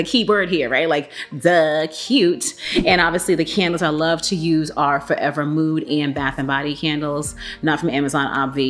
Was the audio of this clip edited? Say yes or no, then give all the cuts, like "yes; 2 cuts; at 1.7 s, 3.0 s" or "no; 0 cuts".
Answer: no; 0 cuts